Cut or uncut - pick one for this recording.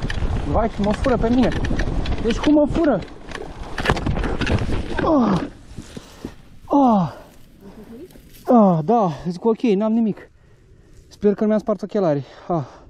uncut